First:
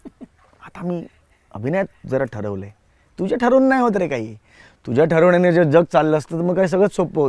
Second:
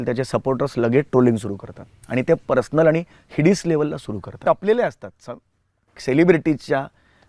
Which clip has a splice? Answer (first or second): second